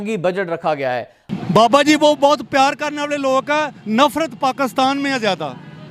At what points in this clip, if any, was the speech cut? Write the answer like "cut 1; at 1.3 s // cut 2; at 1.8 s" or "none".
cut 1; at 1.2 s